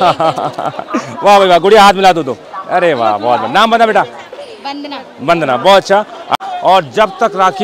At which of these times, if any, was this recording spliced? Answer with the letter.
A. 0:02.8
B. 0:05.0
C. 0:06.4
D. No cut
C